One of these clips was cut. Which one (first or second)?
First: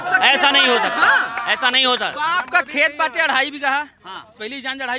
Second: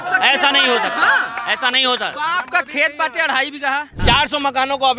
second